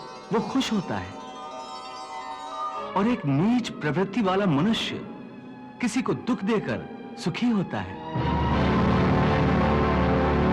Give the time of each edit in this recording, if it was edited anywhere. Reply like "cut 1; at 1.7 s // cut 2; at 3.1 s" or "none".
cut 1; at 2.8 s